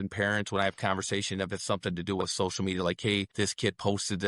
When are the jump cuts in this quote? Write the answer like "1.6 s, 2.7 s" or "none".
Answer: 3.3 s